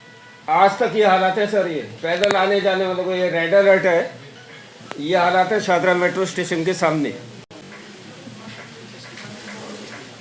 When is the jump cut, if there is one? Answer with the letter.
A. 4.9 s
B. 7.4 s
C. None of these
C